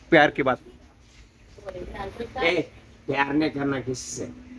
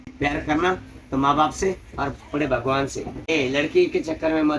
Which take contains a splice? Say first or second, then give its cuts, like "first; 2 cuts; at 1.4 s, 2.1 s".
second; 2 cuts; at 0.9 s, 3.3 s